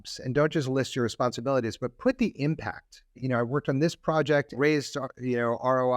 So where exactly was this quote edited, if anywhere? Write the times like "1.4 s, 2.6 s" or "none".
3.2 s, 4.6 s